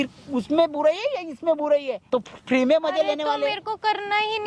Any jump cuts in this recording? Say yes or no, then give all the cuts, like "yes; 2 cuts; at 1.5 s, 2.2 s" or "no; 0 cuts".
yes; 1 cut; at 2.0 s